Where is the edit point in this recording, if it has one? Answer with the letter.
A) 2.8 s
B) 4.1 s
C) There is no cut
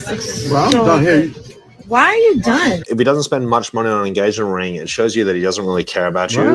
A